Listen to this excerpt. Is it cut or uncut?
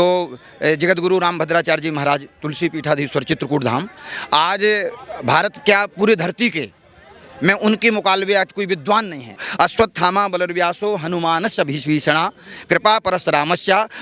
cut